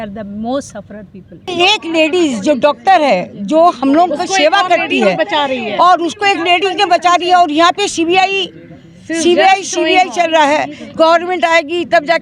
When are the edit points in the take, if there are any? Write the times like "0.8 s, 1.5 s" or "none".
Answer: 1.5 s